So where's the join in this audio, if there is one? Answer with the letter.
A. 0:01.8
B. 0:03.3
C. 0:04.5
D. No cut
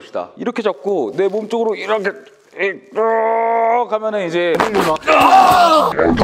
C